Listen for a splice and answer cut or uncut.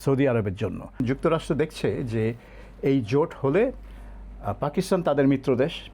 cut